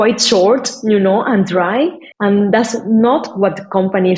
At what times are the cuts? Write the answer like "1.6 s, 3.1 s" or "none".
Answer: 2.1 s